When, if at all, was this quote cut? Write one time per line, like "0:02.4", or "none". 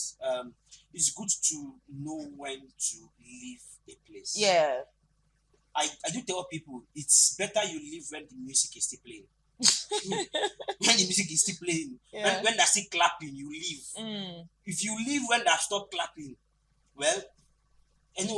none